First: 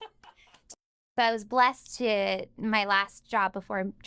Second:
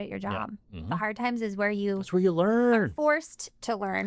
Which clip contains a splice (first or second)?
first